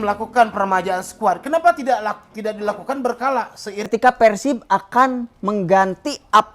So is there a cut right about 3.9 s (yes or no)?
yes